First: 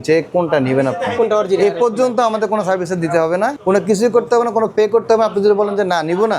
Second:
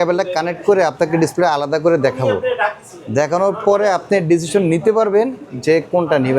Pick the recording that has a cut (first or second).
first